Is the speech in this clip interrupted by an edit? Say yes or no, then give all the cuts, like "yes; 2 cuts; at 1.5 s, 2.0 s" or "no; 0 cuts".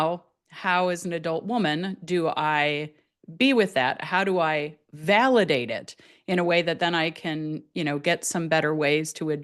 no; 0 cuts